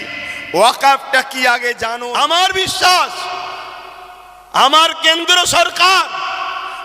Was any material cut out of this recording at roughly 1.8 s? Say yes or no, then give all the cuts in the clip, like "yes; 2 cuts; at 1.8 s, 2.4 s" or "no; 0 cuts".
yes; 1 cut; at 1.8 s